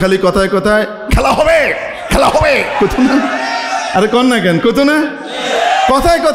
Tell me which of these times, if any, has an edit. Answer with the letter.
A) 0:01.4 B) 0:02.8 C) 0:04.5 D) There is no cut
D